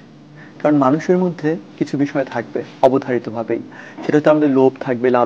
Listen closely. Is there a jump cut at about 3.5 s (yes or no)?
no